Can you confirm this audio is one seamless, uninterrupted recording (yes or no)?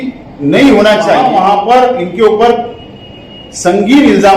no